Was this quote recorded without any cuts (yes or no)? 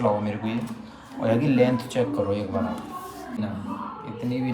no